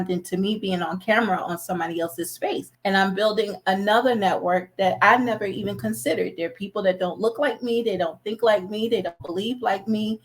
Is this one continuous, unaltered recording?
no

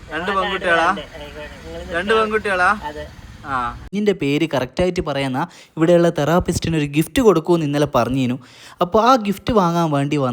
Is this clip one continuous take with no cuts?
no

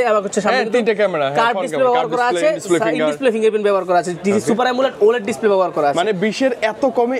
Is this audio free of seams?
yes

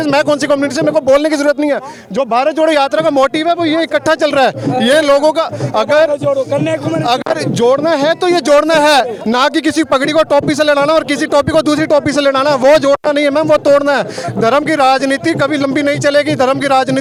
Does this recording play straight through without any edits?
yes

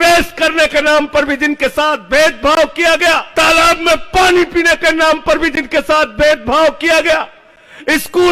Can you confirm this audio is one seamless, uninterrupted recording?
no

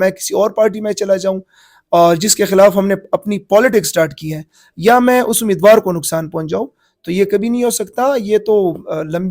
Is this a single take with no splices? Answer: yes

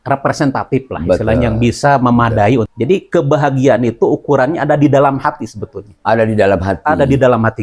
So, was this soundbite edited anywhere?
yes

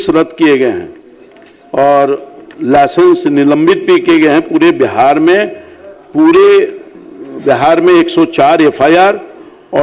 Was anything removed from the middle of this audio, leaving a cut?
no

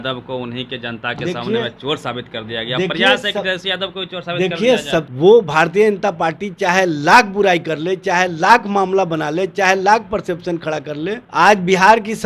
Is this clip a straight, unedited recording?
no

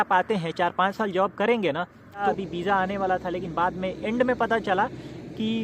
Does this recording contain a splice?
yes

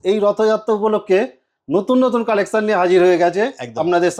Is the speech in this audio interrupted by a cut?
no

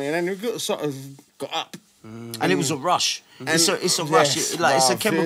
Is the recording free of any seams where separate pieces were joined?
no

